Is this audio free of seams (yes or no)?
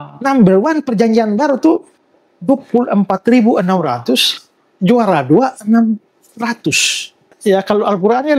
no